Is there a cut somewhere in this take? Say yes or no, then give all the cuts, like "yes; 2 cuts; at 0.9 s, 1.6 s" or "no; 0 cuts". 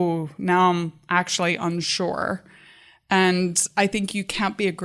no; 0 cuts